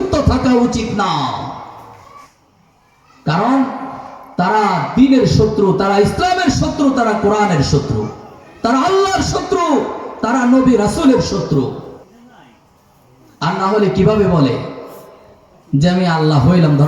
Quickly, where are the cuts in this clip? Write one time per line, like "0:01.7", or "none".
0:02.4
0:12.0